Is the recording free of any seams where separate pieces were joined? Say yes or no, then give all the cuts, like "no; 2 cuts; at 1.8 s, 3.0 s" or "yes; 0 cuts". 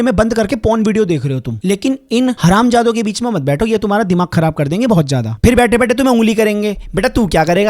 no; 1 cut; at 2.4 s